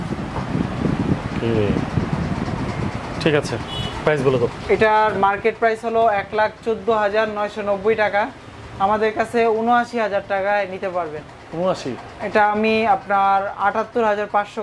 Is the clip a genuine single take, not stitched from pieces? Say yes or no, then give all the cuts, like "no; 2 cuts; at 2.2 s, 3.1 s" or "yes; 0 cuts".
yes; 0 cuts